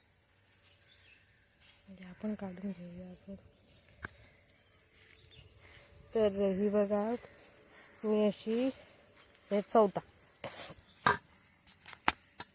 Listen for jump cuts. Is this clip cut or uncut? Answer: uncut